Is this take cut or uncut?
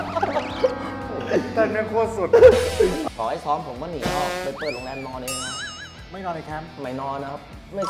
cut